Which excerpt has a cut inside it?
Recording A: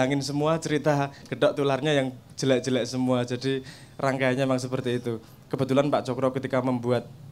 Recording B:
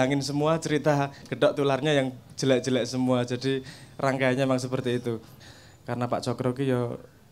B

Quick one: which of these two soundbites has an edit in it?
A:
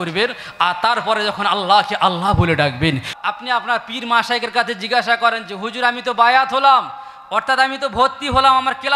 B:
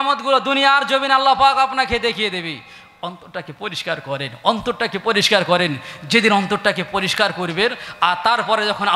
A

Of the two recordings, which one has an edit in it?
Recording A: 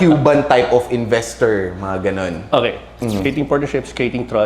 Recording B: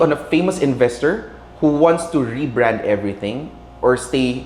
A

